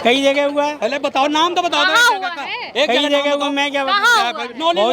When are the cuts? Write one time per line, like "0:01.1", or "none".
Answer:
none